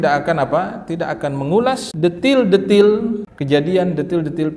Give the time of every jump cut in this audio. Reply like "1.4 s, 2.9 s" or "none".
1.9 s, 3.3 s